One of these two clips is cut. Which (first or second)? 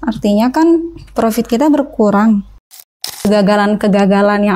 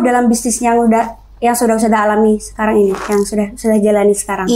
first